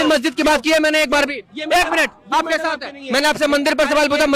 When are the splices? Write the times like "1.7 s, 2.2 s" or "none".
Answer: none

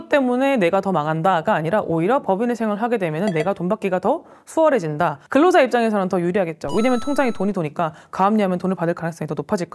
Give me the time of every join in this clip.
5.2 s

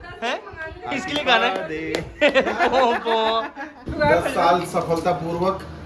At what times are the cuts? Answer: 3.7 s

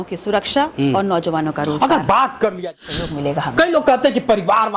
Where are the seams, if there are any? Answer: 2.7 s

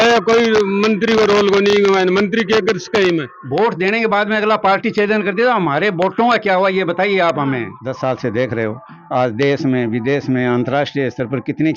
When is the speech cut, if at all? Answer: 3.3 s, 7.7 s

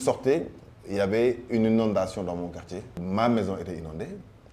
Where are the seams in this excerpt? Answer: 3.0 s

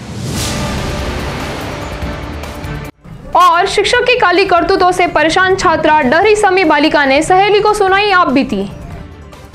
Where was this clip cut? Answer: none

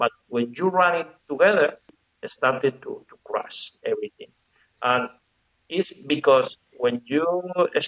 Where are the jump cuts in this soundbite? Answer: none

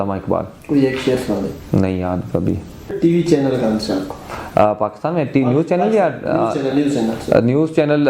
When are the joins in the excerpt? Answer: 3.0 s

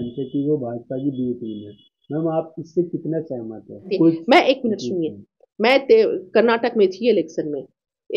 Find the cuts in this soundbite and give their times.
3.9 s

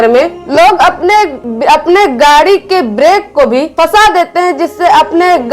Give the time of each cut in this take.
1.4 s, 3.7 s

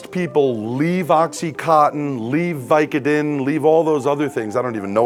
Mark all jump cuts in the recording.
none

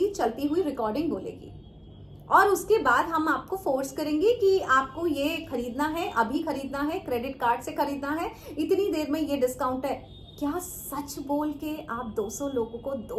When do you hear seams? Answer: none

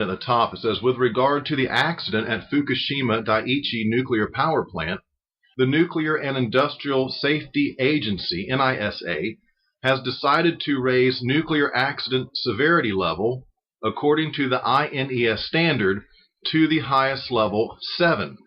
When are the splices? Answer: 8.7 s

